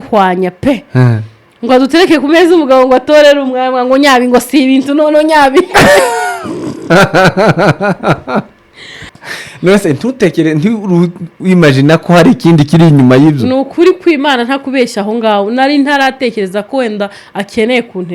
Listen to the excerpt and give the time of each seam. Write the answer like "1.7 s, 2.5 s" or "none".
9.1 s